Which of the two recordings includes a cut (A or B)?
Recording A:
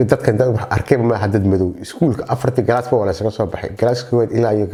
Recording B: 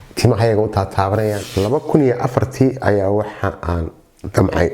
B